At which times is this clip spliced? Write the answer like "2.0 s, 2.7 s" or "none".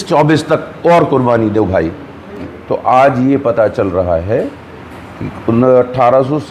2.5 s